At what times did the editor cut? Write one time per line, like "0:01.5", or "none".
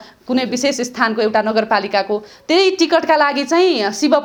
none